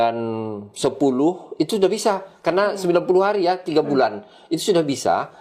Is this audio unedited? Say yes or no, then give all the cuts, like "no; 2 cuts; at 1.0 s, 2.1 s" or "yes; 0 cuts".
yes; 0 cuts